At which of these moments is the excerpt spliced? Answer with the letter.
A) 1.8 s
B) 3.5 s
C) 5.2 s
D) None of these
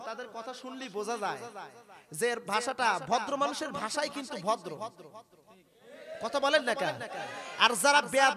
D